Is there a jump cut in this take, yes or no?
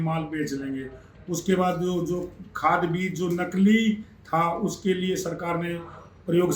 no